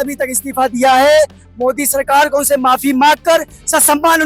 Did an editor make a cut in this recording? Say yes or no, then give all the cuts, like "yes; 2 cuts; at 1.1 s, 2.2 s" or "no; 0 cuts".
no; 0 cuts